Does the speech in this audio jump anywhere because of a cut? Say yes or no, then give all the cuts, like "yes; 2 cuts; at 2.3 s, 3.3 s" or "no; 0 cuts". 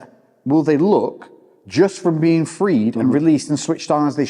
no; 0 cuts